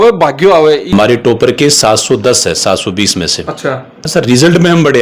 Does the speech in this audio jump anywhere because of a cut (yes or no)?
yes